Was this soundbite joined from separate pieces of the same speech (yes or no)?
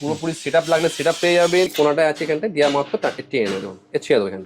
yes